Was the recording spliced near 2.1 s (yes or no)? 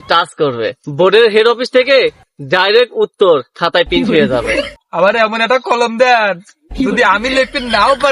no